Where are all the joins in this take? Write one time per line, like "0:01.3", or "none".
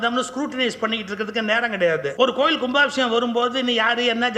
0:02.1

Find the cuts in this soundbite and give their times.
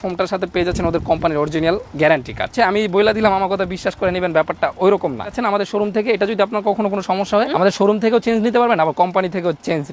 0:02.5
0:05.4
0:07.5

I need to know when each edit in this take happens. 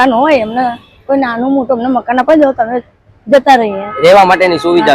none

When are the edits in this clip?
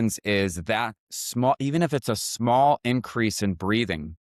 none

